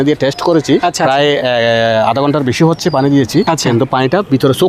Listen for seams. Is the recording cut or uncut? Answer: cut